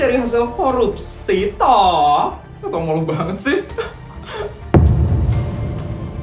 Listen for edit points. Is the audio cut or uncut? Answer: cut